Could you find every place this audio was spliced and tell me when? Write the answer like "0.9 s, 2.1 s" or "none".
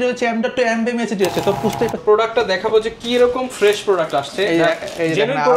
2.0 s